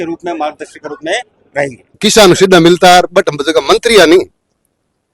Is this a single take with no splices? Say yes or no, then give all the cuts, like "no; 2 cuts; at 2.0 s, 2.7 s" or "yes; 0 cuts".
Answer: no; 1 cut; at 1.9 s